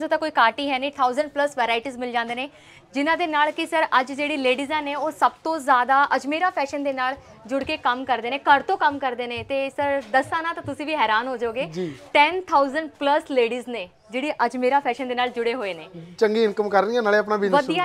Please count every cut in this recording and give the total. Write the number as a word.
zero